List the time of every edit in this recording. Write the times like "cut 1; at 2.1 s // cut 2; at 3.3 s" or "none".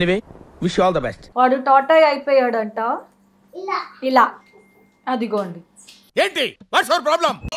cut 1; at 1.2 s